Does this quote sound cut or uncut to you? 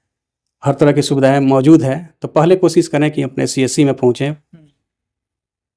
uncut